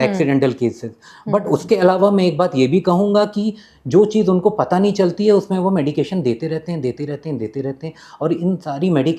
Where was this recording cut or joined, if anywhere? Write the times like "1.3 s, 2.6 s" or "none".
none